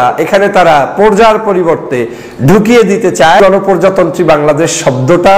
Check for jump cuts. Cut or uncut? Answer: cut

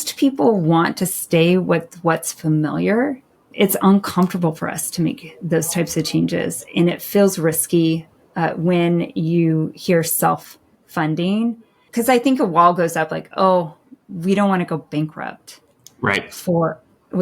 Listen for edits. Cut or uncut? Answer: cut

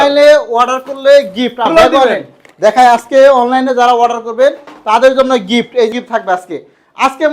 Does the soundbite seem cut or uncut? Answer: cut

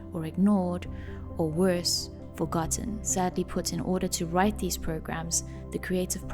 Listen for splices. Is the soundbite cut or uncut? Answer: uncut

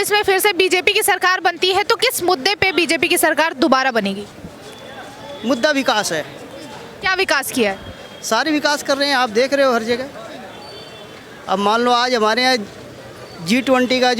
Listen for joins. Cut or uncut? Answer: uncut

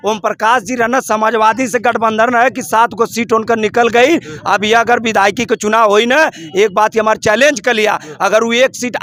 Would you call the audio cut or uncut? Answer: uncut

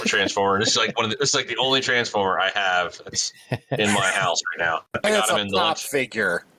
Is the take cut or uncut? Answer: cut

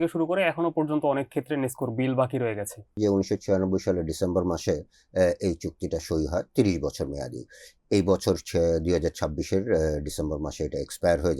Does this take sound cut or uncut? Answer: cut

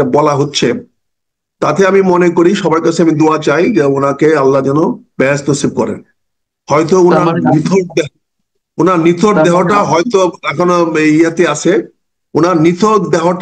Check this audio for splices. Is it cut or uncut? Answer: uncut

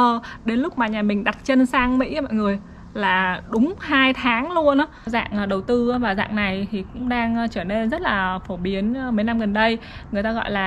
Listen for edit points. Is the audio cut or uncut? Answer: cut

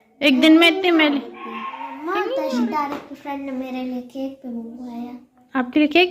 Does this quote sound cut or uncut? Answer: cut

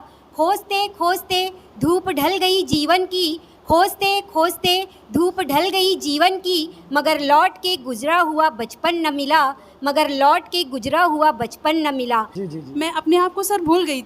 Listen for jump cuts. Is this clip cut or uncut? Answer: cut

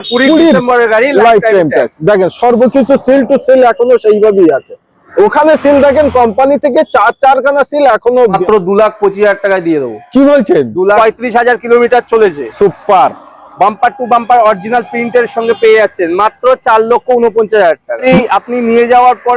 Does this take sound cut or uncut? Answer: cut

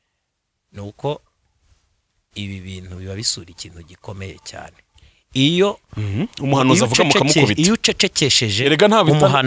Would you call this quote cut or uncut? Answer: uncut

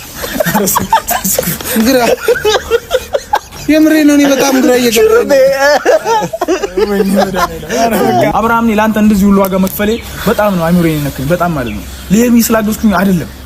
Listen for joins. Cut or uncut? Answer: cut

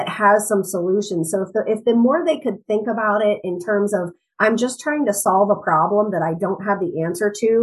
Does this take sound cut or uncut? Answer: uncut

